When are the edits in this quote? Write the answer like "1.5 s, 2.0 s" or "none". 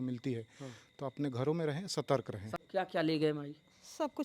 2.5 s